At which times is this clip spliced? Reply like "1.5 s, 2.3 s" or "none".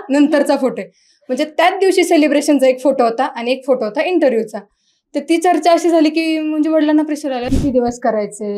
7.5 s